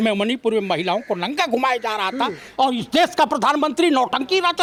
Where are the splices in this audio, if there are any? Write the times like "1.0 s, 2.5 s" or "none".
none